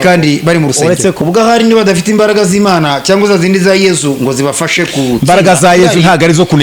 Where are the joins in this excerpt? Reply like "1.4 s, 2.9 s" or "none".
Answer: 1.2 s